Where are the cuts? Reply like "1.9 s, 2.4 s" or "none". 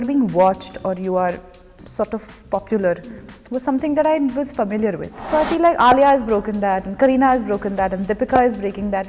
5.3 s

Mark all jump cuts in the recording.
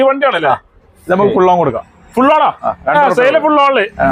none

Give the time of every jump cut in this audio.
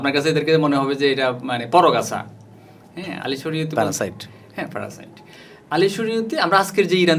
none

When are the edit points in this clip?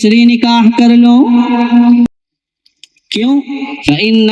2.1 s

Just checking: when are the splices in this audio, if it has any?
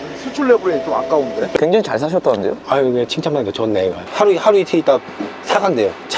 1.6 s, 4.0 s

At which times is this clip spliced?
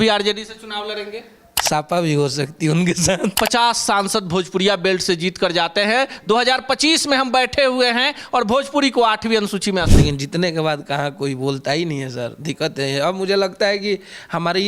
3.3 s, 9.9 s

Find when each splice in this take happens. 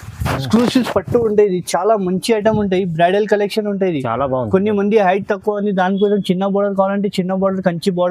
none

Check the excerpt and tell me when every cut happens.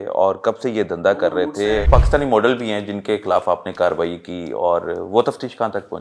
1.9 s

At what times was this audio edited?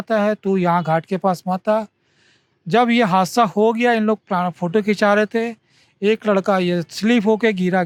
none

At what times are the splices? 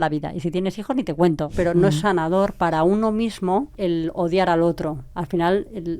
1.5 s, 3.7 s, 5.1 s

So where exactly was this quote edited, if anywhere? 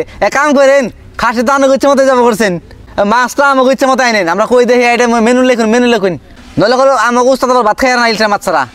2.8 s, 6.4 s

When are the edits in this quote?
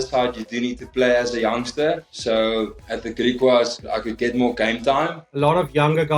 2.0 s, 5.2 s

